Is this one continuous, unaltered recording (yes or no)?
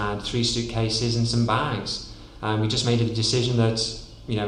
yes